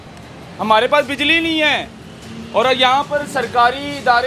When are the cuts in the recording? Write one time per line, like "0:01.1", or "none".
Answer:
none